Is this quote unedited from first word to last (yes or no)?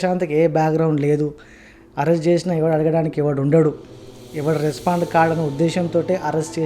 yes